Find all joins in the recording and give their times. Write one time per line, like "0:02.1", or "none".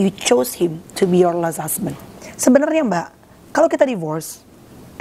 0:02.0